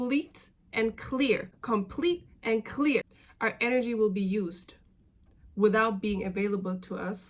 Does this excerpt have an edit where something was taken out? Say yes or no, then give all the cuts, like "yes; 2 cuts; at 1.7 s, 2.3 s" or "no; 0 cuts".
yes; 1 cut; at 1.5 s